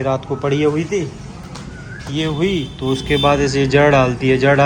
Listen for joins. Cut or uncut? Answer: uncut